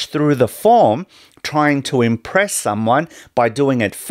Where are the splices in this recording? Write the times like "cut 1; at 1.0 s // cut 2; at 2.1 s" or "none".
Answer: none